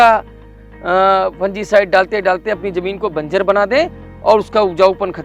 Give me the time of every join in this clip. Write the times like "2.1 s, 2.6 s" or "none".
none